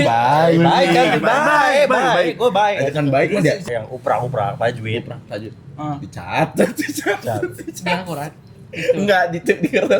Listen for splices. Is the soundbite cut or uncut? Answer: cut